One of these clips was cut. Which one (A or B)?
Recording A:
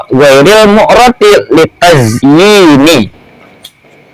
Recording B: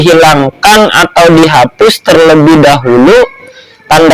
A